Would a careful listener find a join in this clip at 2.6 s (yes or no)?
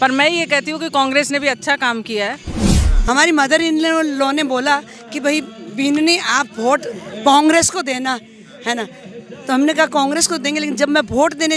yes